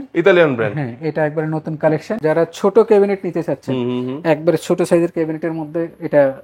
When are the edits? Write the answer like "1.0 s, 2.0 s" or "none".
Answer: 2.1 s

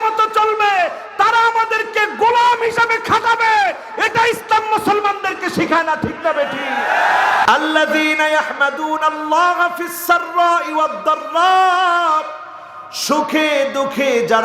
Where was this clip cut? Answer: 7.4 s

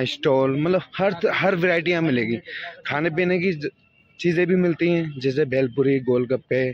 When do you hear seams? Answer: none

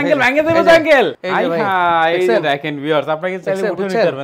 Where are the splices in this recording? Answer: 1.2 s

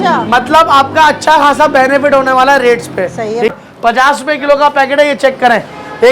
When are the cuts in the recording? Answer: 3.5 s

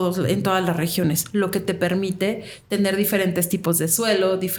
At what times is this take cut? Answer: none

